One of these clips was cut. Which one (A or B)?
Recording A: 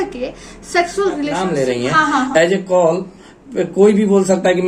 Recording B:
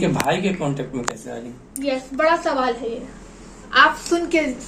A